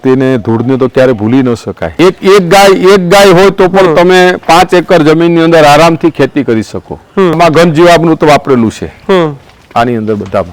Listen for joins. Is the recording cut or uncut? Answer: cut